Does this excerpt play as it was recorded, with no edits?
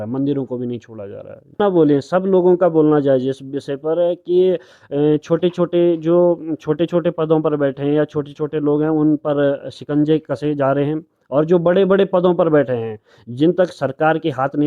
no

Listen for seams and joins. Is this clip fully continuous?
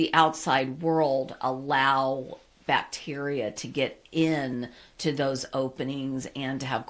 yes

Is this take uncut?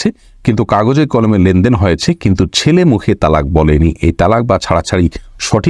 yes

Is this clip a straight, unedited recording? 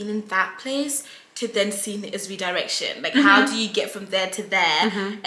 yes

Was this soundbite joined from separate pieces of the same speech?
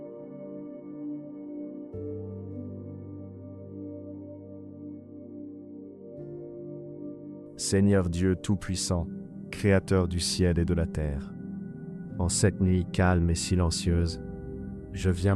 yes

